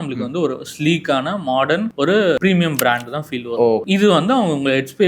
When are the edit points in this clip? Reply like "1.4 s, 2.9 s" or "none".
2.2 s, 3.8 s